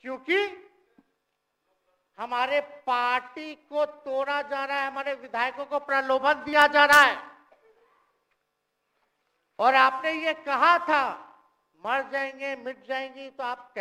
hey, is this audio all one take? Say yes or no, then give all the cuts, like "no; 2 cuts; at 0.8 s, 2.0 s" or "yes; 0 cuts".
yes; 0 cuts